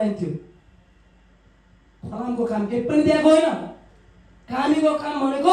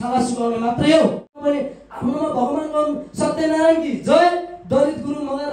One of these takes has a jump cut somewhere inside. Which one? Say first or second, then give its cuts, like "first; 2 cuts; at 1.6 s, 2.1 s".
second; 1 cut; at 1.4 s